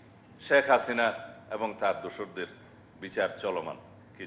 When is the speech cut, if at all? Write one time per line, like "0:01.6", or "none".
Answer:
none

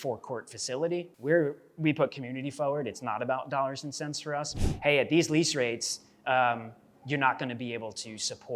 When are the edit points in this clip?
0:01.1
0:04.5

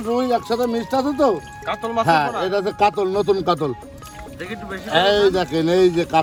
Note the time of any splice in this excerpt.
none

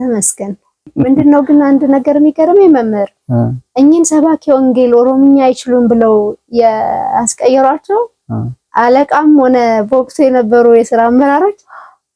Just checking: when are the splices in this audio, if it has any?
0:00.9

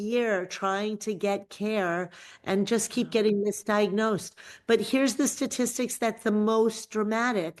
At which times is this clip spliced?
none

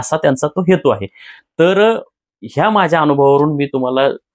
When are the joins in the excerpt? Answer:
none

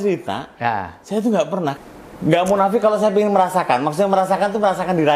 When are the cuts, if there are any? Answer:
0:01.8

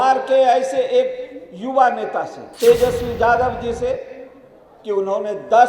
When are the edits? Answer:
0:02.4

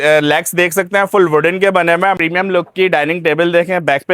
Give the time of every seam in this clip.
0:02.2

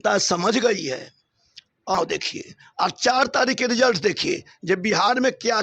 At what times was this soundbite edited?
0:01.9

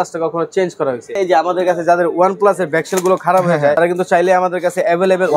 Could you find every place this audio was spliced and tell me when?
0:01.1
0:03.8

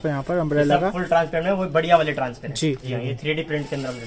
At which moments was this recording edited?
0:02.9

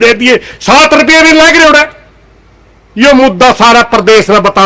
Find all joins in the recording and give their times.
none

